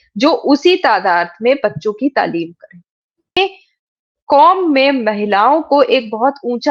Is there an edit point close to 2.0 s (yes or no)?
no